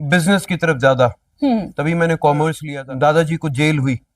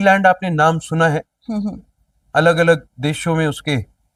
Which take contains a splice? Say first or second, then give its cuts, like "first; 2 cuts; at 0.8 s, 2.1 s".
first; 1 cut; at 2.6 s